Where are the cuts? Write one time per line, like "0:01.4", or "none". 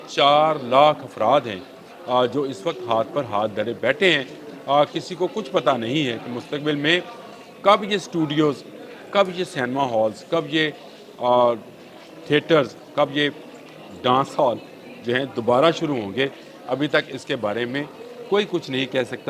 none